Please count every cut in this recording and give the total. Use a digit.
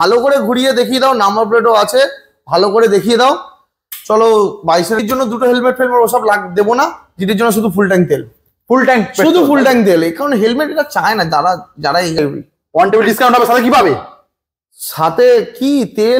2